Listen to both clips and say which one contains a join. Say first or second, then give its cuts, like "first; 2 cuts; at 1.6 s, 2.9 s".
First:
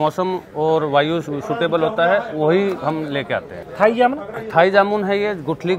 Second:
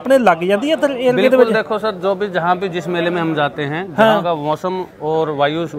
first; 1 cut; at 3.6 s